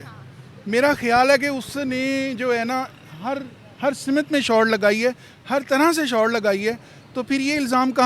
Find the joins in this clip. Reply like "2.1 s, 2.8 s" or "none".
none